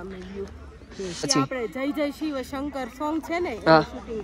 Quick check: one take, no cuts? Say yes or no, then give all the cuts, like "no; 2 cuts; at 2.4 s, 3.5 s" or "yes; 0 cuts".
no; 1 cut; at 1.3 s